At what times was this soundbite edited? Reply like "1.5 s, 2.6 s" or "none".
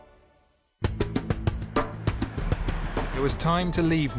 1.9 s

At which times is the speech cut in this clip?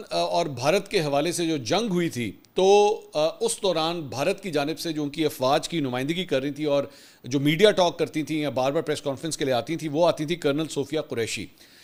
none

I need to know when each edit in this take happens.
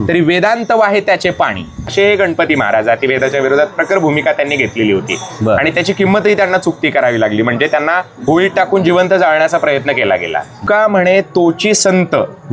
1.9 s, 10.6 s

